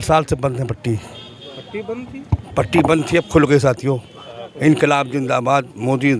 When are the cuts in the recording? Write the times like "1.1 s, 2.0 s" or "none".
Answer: none